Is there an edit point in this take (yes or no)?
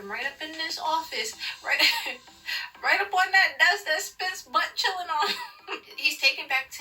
no